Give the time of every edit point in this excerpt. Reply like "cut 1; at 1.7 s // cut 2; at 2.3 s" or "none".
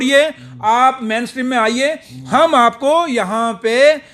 none